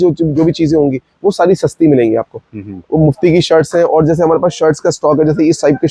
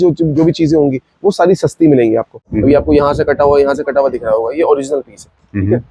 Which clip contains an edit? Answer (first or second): second